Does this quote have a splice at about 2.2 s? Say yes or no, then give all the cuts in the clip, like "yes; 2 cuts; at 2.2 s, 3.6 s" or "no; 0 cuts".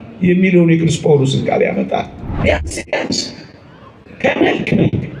yes; 1 cut; at 2.2 s